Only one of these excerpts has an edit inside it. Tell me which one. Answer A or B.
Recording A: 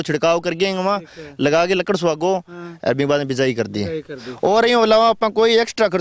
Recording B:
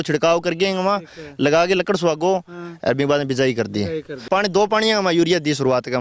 B